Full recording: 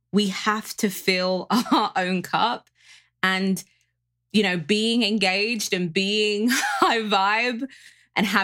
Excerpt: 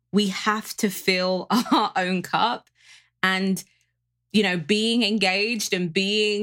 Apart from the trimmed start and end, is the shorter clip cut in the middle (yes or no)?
no